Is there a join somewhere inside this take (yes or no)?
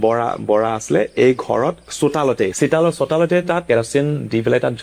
yes